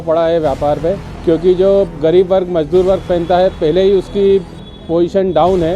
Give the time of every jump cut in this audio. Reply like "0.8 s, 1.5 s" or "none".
1.1 s